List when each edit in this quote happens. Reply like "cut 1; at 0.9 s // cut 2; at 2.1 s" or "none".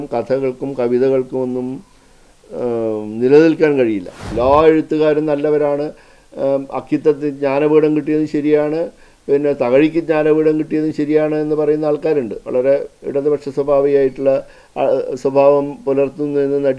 cut 1; at 4.3 s